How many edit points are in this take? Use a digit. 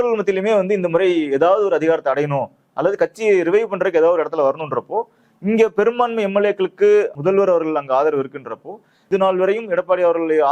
2